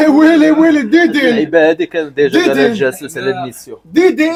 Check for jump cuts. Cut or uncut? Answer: uncut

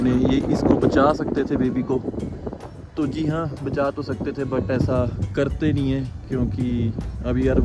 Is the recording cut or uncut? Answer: uncut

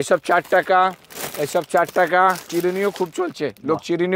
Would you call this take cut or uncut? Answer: cut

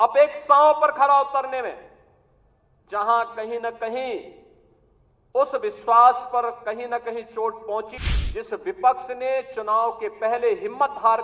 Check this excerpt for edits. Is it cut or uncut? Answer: cut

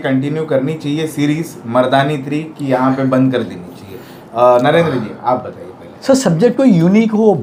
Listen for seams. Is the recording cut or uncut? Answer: uncut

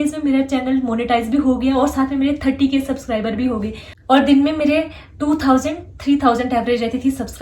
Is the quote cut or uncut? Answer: uncut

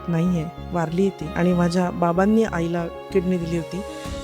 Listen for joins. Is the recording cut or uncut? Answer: cut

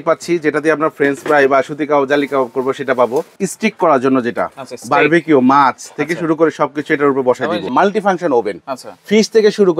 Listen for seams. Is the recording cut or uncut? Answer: cut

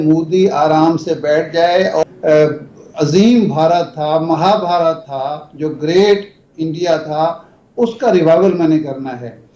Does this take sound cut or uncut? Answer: cut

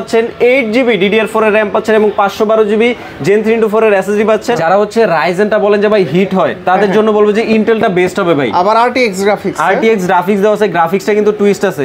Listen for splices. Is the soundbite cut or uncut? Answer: cut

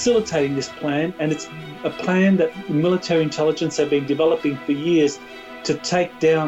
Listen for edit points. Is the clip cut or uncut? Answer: uncut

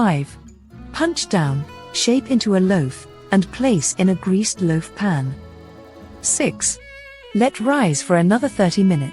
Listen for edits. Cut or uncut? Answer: cut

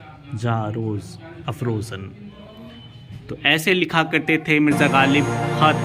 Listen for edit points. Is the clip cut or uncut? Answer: uncut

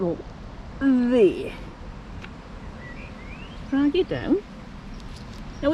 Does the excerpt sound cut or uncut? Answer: uncut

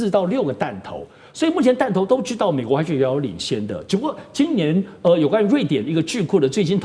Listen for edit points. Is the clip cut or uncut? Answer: uncut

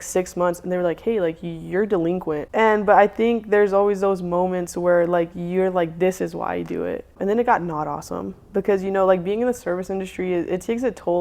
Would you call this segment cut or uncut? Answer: cut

